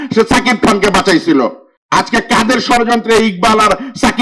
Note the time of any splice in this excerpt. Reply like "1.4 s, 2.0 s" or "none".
1.7 s